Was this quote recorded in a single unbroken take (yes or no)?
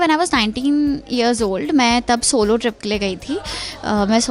yes